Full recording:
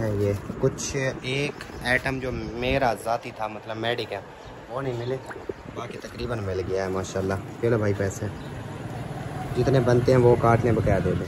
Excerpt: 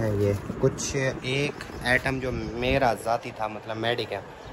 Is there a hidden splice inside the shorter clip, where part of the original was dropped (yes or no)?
no